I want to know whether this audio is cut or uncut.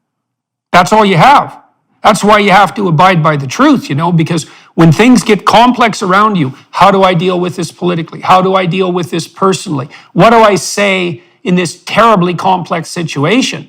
uncut